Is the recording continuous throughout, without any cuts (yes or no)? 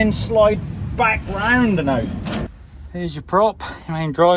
no